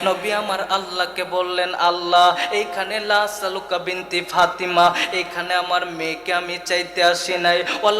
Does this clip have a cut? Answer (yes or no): yes